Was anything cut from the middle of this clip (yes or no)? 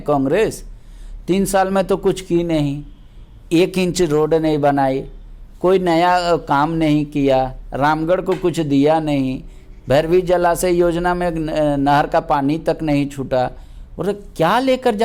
no